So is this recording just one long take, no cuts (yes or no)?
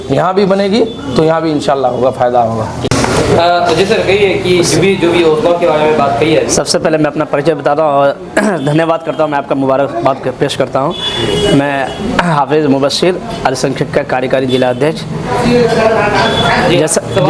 yes